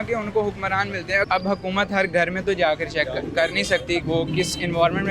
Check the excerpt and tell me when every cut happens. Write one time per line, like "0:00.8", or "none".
0:01.3
0:04.0